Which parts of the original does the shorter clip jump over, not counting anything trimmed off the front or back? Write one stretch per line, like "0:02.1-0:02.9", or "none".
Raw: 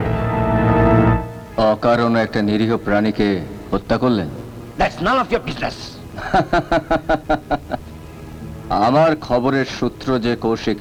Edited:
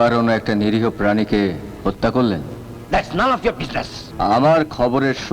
0:05.9-0:08.5

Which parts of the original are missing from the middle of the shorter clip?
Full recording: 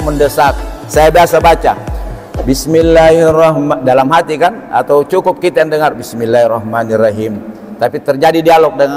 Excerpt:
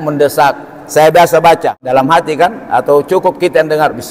0:01.8-0:03.8

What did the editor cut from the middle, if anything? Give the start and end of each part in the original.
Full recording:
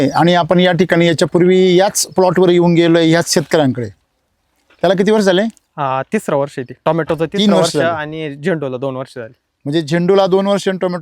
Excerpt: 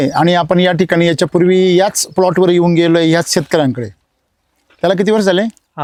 none

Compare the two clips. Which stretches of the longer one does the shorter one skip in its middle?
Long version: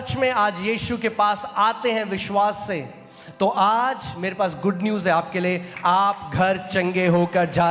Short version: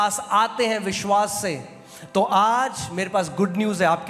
none

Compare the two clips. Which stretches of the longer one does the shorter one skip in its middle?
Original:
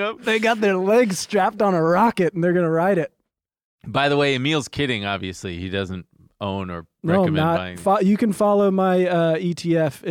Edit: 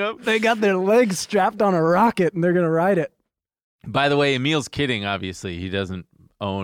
none

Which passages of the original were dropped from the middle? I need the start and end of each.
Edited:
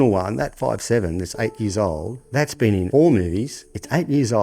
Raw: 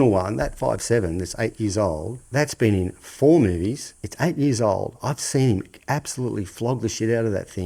0:02.9-0:03.2

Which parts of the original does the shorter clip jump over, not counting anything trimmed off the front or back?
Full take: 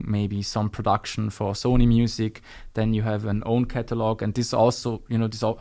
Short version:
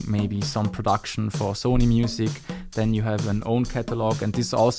none

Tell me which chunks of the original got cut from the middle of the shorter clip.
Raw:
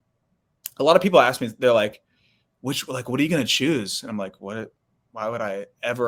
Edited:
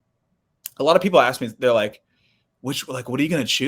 none

